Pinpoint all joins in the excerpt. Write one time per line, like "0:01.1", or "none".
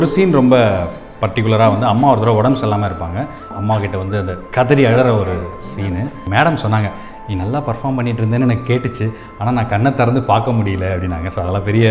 0:03.5
0:06.2